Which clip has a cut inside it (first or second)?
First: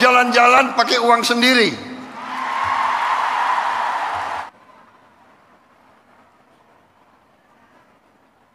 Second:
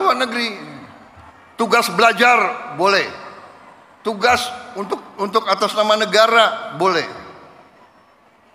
first